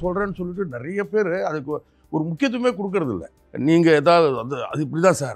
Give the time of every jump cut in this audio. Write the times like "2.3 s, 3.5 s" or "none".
3.4 s